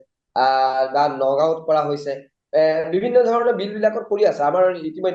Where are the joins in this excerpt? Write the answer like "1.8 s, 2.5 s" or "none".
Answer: none